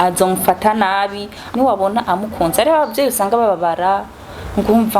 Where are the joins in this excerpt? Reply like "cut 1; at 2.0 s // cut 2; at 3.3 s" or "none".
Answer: cut 1; at 1.4 s

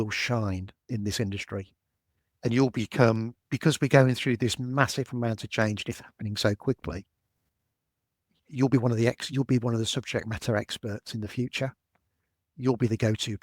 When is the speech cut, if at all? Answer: none

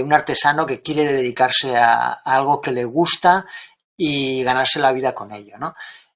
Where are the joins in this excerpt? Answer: none

